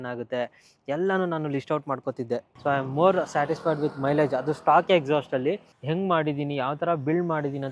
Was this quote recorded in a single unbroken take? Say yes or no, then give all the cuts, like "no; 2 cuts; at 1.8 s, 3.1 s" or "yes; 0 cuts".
no; 2 cuts; at 2.5 s, 5.7 s